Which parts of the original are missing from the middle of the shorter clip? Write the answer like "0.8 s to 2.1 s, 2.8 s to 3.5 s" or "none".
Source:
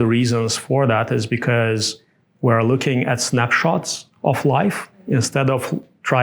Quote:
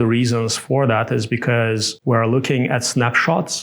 1.9 s to 2.3 s